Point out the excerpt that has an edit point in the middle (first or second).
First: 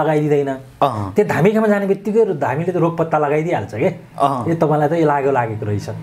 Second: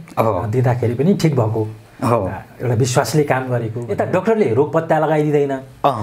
second